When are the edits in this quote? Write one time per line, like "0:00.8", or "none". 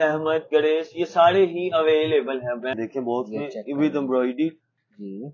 0:02.8